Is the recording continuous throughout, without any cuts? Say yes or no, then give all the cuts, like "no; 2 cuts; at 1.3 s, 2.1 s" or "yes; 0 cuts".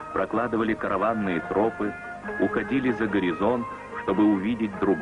no; 1 cut; at 2.6 s